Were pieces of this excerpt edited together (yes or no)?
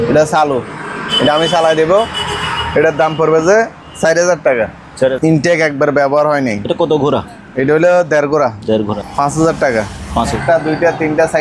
yes